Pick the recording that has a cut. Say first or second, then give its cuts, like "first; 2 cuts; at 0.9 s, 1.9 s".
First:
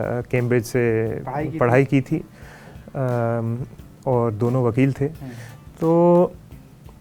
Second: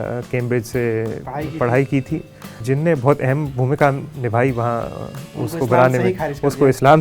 second; 1 cut; at 2.6 s